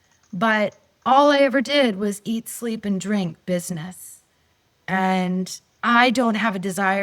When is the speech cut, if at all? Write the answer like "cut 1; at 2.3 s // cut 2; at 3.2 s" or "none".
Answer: cut 1; at 5.7 s